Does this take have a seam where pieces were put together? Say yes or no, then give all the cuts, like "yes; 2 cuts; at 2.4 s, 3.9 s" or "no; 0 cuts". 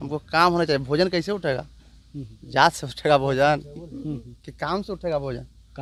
no; 0 cuts